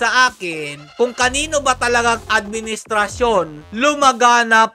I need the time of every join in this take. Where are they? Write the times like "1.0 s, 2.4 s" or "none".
none